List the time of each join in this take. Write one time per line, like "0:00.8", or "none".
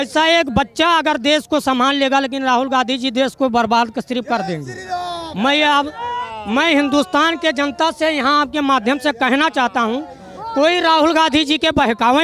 none